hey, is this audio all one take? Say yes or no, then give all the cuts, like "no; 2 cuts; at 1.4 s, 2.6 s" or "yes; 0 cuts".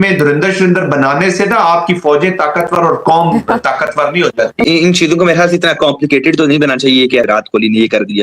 no; 2 cuts; at 4.7 s, 7.3 s